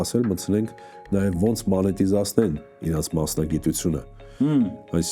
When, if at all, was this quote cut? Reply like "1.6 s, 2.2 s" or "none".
none